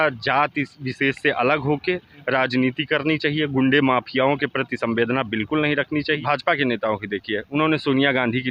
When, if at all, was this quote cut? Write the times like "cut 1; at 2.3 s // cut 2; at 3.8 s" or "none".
cut 1; at 6.2 s